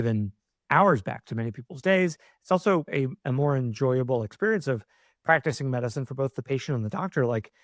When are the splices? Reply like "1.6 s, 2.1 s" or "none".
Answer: 2.9 s